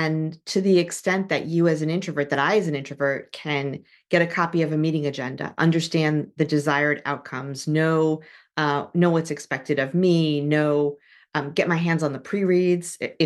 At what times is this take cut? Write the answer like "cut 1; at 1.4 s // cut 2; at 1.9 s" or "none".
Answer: none